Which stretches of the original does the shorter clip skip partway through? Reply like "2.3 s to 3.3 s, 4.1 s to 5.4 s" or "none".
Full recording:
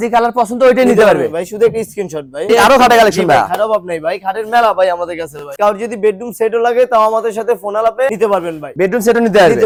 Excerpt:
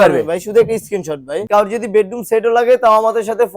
2.4 s to 5.4 s